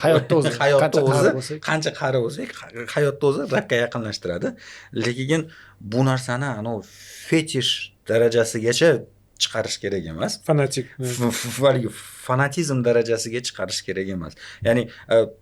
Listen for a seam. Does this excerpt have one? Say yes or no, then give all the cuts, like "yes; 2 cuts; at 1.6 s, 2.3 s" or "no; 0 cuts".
no; 0 cuts